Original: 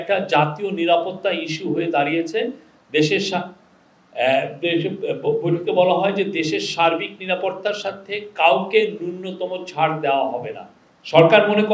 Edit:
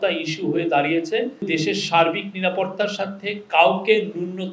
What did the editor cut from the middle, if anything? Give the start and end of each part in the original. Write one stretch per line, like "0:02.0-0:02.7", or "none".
0:02.7-0:06.3